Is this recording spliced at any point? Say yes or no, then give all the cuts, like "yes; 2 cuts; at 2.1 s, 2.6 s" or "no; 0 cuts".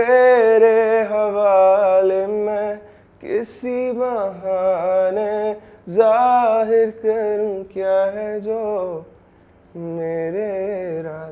no; 0 cuts